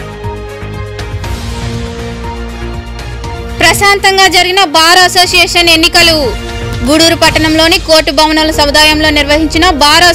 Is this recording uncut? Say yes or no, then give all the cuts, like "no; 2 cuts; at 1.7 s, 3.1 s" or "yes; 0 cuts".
no; 1 cut; at 1.1 s